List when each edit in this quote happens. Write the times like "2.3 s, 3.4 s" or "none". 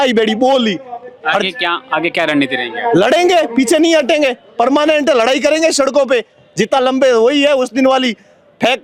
none